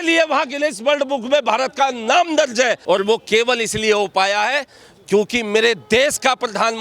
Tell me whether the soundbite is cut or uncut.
cut